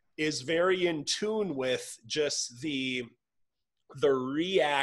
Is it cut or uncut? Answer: uncut